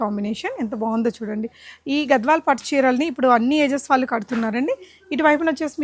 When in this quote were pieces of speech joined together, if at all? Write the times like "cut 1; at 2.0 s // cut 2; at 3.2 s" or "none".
none